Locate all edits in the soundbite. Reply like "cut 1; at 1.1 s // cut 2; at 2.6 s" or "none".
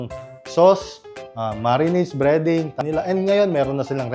cut 1; at 2.8 s